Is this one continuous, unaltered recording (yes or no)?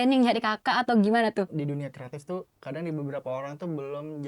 no